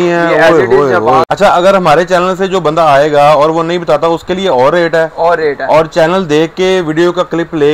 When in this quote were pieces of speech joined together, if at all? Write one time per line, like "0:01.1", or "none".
0:01.3